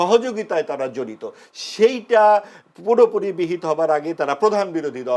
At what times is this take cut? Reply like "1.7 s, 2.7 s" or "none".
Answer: none